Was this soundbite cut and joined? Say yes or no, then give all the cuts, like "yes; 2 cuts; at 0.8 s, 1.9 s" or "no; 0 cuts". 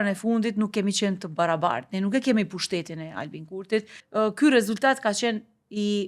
yes; 1 cut; at 4.0 s